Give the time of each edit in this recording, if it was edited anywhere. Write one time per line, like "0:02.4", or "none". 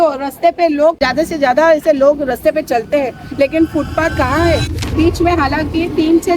0:01.0
0:04.8